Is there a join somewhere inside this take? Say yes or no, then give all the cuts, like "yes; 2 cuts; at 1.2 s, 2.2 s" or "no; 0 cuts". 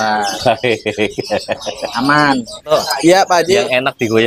yes; 1 cut; at 2.7 s